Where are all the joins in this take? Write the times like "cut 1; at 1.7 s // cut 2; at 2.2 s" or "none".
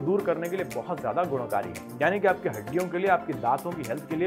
none